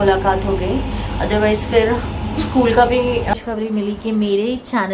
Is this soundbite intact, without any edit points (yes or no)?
no